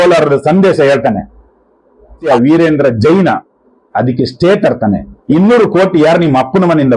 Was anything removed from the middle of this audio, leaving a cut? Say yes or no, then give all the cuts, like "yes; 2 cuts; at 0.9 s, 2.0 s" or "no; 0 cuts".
yes; 2 cuts; at 2.2 s, 5.1 s